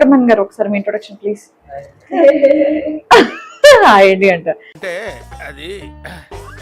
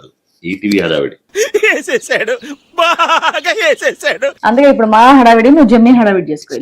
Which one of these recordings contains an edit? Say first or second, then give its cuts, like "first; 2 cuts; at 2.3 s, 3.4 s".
second; 1 cut; at 4.4 s